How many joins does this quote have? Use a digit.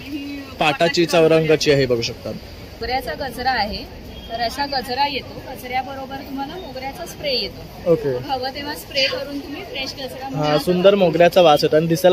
1